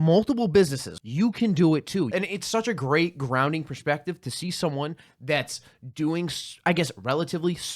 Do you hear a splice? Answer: yes; 2 cuts; at 1.0 s, 2.1 s

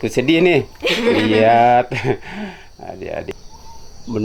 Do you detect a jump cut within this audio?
yes; 1 cut; at 3.3 s

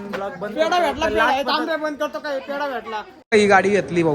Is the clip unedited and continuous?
no; 1 cut; at 3.1 s

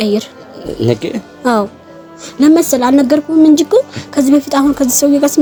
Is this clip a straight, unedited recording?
yes; 0 cuts

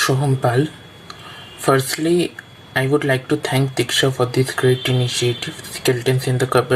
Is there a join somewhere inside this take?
no; 0 cuts

